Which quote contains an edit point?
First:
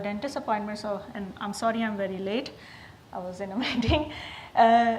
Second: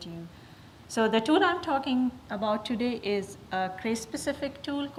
first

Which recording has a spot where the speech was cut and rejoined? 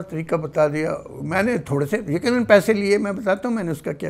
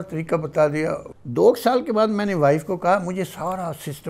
second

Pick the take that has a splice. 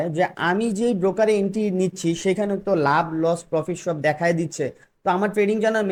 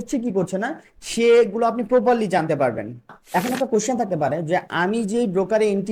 second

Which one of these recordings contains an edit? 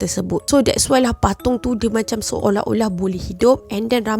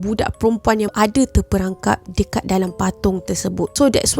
second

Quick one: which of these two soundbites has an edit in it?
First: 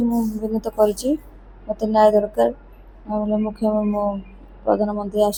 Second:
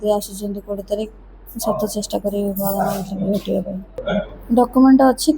second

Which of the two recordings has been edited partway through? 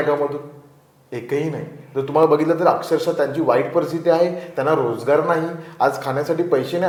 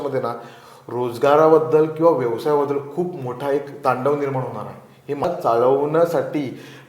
second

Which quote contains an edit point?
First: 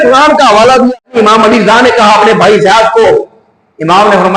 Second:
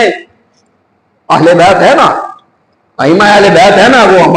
first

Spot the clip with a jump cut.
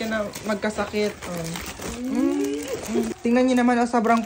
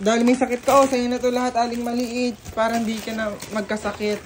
first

